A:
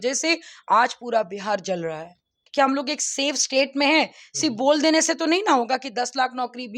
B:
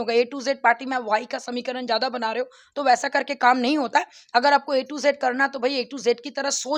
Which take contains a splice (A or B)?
A